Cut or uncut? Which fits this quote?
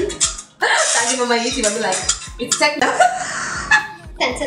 cut